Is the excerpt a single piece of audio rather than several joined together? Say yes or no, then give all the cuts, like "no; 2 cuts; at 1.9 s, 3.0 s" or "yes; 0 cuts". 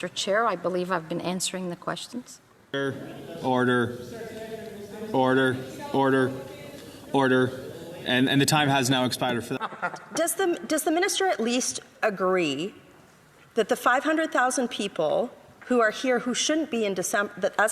no; 2 cuts; at 2.8 s, 9.5 s